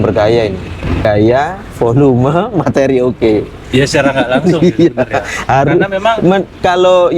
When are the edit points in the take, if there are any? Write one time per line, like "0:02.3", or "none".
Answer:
0:01.1